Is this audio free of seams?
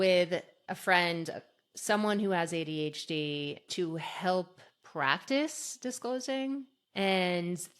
no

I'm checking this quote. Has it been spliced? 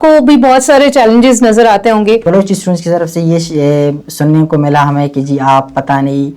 yes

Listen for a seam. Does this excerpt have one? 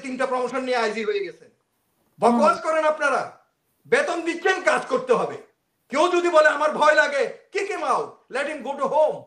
no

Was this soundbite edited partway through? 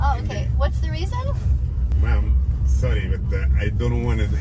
yes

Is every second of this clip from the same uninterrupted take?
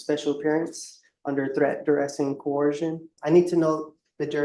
no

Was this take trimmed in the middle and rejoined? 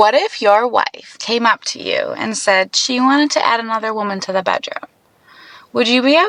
no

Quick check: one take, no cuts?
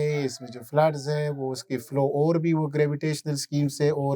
yes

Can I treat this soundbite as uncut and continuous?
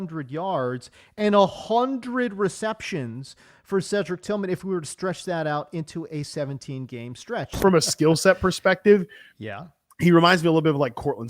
no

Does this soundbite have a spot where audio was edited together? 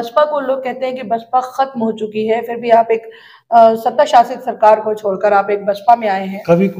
no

